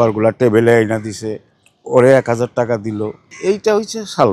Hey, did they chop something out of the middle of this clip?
yes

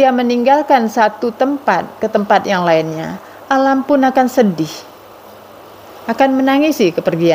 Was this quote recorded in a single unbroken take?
yes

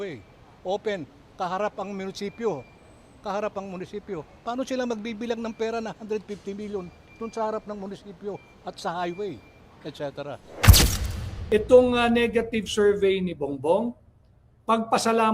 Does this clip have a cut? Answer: yes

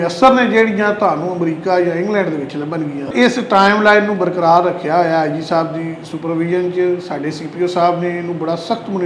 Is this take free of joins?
no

